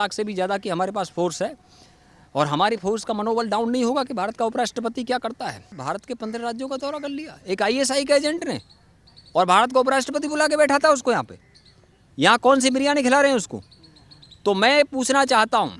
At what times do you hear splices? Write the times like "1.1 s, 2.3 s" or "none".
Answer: 5.7 s